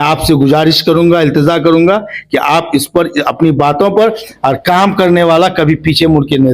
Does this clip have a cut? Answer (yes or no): yes